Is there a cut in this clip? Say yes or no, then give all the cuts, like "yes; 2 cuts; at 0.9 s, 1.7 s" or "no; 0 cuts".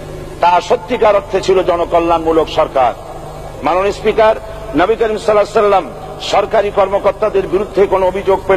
yes; 1 cut; at 3.5 s